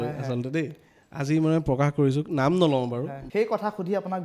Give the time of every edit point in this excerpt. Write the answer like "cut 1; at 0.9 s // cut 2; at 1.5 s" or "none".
cut 1; at 3.2 s